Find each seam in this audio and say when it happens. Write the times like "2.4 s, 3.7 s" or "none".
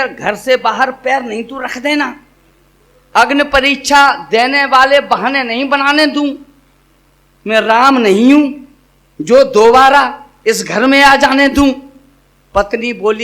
none